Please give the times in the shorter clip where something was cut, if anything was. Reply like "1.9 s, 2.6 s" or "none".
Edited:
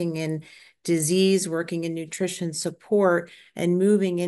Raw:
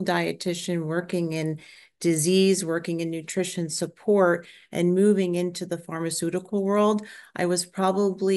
none